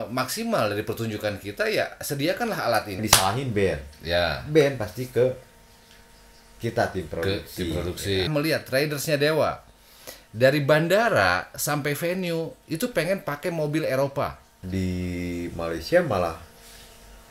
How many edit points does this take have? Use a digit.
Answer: 3